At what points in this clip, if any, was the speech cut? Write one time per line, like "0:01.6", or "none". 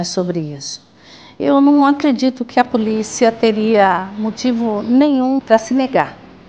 0:05.4